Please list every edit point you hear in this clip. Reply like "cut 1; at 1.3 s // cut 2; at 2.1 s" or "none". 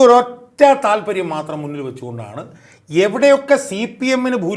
none